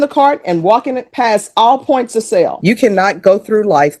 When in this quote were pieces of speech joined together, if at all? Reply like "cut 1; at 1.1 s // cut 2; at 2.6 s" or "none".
cut 1; at 2.6 s